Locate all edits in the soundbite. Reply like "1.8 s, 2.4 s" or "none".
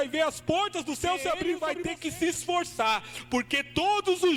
1.6 s